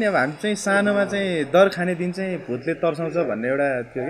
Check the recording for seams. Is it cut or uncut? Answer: uncut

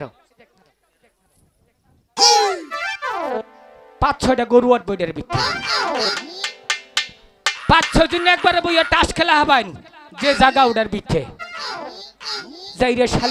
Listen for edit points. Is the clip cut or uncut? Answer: uncut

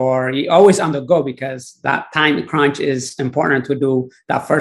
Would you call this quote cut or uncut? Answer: uncut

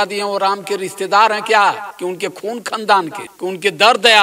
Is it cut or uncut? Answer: cut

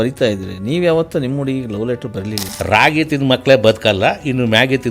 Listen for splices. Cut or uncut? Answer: cut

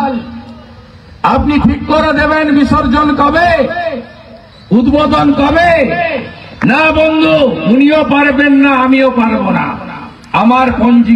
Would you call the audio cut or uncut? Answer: uncut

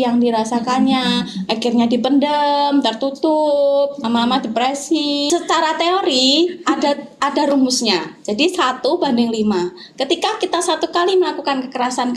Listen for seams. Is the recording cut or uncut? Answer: cut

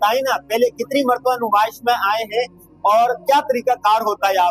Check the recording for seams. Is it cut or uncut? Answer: uncut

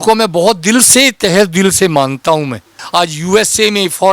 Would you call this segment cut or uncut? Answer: cut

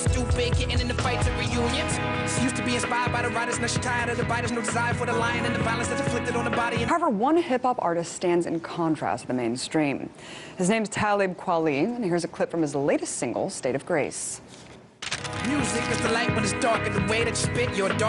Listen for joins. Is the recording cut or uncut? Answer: uncut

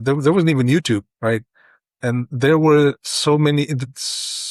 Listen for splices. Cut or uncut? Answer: uncut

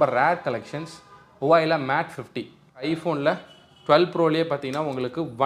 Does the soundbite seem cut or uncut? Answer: cut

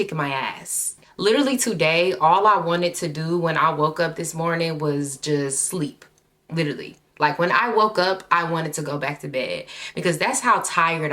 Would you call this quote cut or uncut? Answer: cut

